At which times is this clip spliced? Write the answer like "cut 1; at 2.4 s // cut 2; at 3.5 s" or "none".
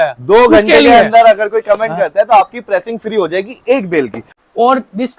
cut 1; at 4.2 s